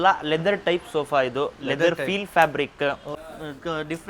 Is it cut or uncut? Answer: cut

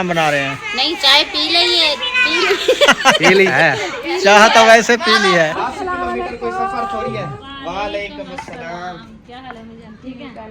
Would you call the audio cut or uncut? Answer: cut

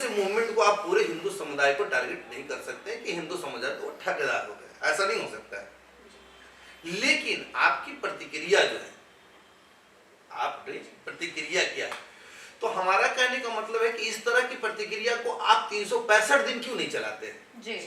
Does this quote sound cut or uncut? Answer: uncut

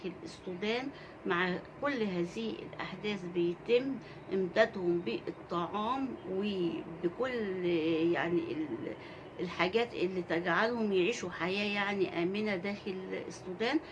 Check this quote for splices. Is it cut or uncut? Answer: uncut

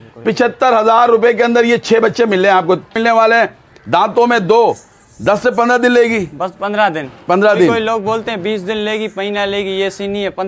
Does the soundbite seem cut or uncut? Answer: cut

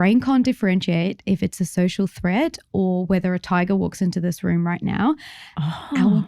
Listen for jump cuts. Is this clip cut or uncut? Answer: uncut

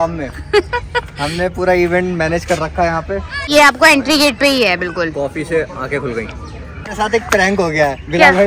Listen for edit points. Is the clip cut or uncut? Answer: cut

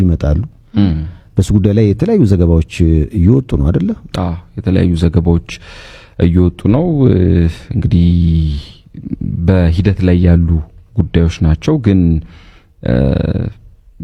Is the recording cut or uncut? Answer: uncut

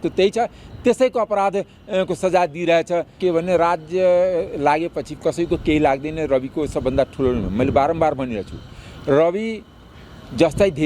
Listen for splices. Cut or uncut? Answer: cut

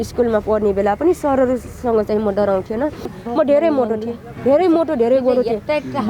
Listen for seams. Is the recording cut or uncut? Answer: cut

